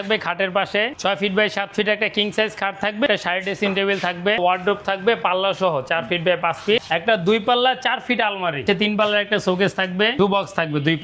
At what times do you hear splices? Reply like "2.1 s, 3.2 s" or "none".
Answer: 0.9 s, 3.1 s, 4.4 s, 6.8 s, 8.6 s, 10.1 s